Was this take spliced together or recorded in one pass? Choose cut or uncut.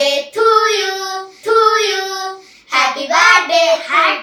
uncut